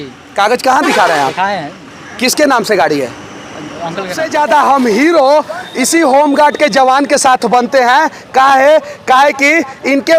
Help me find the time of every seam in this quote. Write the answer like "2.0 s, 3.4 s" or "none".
4.2 s